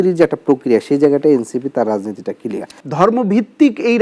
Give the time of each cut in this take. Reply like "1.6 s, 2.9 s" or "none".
2.7 s